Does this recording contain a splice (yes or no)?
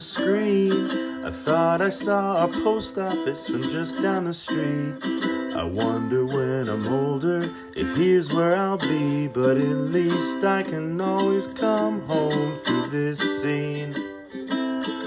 no